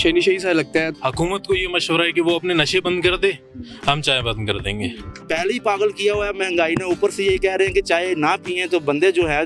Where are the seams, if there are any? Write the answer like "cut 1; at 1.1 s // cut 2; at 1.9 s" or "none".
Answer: cut 1; at 1.0 s // cut 2; at 5.1 s